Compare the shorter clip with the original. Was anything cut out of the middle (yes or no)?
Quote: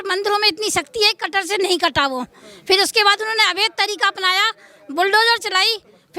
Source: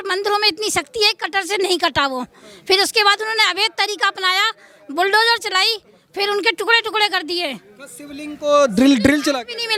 no